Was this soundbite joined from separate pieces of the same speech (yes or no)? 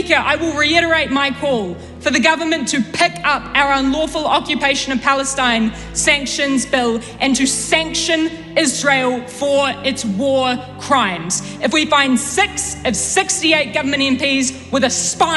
no